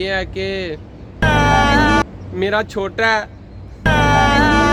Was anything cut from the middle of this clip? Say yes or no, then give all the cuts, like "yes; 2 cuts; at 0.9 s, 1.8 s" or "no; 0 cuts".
no; 0 cuts